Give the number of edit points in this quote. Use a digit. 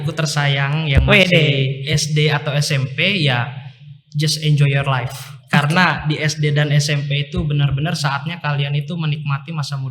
0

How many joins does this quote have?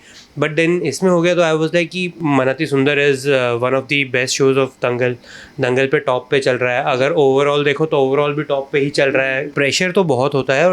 2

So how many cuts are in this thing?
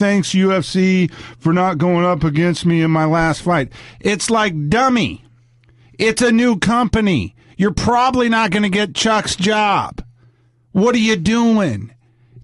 1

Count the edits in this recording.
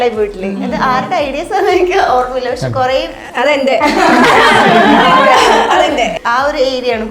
1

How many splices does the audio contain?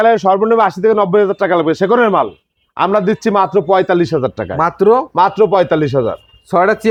0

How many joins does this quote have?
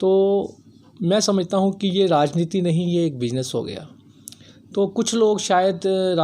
0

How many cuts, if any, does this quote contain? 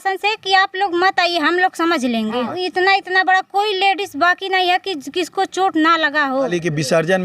2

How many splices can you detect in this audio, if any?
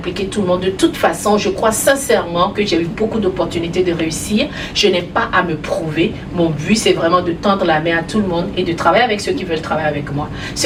0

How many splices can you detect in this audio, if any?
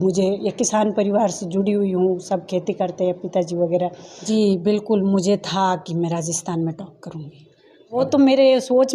2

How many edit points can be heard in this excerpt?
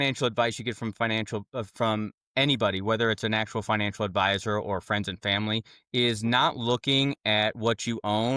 0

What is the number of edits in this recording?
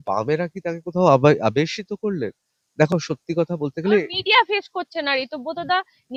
0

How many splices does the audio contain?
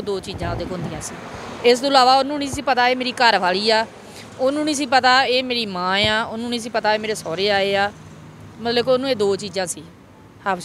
0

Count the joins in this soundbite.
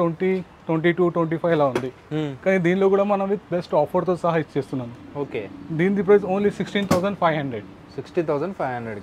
0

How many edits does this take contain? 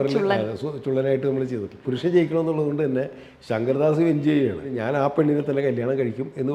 2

